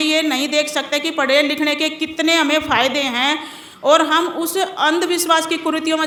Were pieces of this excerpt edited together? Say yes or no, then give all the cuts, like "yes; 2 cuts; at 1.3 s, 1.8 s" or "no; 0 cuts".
no; 0 cuts